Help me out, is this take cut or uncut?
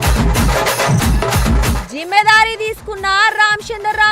cut